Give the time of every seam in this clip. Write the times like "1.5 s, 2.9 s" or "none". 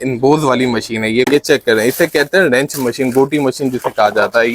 1.3 s